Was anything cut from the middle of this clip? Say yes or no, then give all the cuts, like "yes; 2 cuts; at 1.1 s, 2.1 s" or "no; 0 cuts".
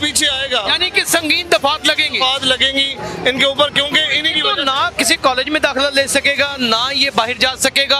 no; 0 cuts